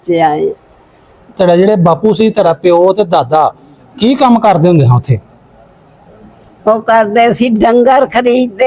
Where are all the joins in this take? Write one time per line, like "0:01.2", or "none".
0:01.1